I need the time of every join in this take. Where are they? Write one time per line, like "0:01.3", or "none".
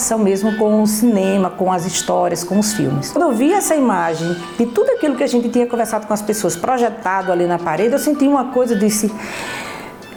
none